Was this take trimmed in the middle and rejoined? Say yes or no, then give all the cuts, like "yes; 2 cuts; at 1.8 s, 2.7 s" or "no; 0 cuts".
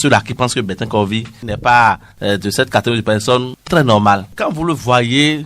yes; 2 cuts; at 1.4 s, 4.3 s